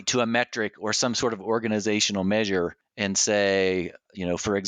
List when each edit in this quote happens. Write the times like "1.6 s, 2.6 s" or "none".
2.9 s